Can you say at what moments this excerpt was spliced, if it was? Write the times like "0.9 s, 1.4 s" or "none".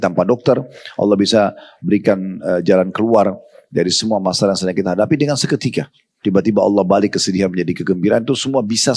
none